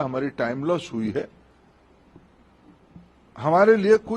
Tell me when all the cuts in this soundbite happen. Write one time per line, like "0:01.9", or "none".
none